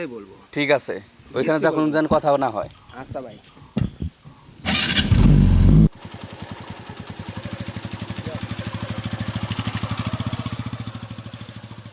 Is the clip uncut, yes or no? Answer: no